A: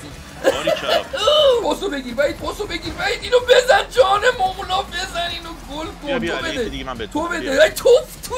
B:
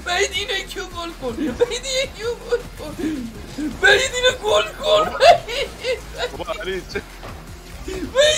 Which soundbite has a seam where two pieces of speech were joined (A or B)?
A